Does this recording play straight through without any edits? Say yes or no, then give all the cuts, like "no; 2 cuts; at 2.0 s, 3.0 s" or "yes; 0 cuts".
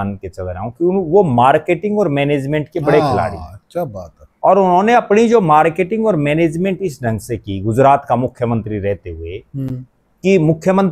yes; 0 cuts